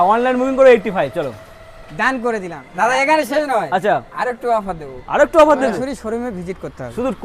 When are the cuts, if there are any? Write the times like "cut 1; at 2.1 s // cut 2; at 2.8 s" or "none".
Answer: cut 1; at 2.6 s // cut 2; at 5.7 s